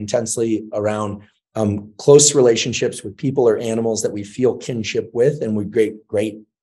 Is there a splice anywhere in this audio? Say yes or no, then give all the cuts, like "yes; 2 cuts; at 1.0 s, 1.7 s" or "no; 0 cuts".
no; 0 cuts